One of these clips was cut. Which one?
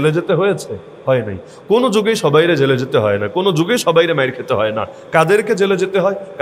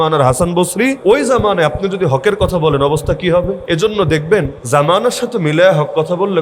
second; 3 cuts; at 1.0 s, 3.6 s, 4.6 s

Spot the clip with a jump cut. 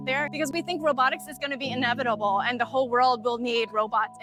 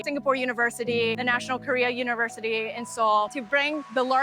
second; 1 cut; at 1.2 s

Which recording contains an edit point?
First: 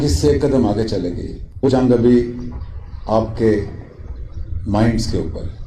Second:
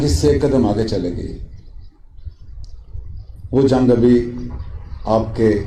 first; 1 cut; at 1.7 s

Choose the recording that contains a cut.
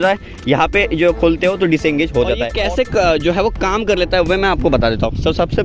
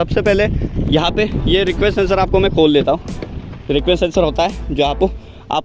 first; 1 cut; at 2.5 s

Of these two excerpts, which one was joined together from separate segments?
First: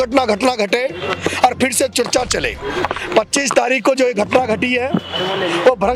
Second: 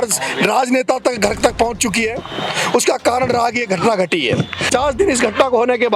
second; 1 cut; at 4.7 s

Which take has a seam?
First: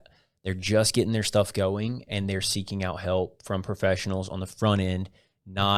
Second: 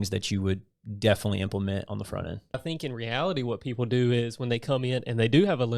second; 1 cut; at 2.6 s

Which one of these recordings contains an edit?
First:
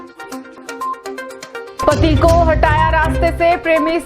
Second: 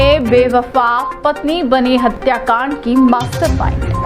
first; 1 cut; at 1.6 s

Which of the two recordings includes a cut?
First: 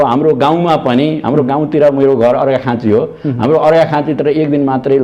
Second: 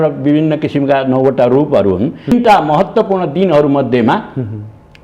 second; 1 cut; at 2.3 s

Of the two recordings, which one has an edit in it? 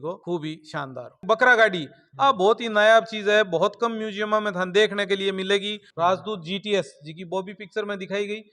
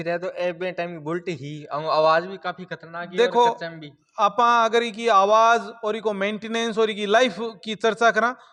first; 2 cuts; at 1.2 s, 5.8 s

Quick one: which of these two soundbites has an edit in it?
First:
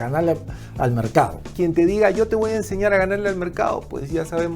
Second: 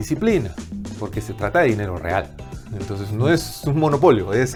first; 1 cut; at 1.4 s

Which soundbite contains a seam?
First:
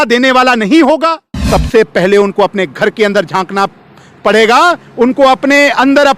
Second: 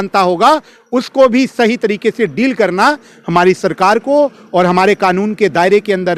first; 1 cut; at 1.3 s

